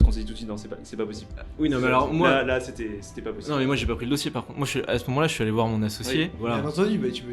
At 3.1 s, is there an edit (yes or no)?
no